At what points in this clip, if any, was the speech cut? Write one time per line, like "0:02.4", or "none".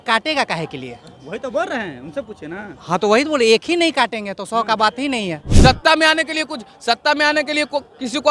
0:05.5